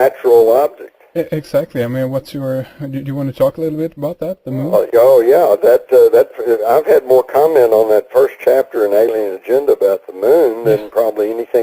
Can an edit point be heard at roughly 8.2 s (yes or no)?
yes